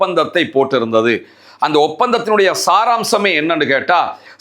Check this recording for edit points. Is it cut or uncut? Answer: uncut